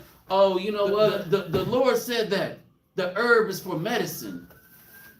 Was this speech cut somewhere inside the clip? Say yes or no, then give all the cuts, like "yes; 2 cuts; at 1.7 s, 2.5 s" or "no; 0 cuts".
yes; 1 cut; at 1.2 s